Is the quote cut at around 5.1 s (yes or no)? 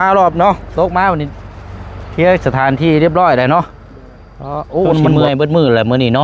yes